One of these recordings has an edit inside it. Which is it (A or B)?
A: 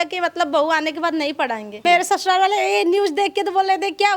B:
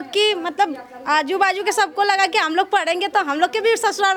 A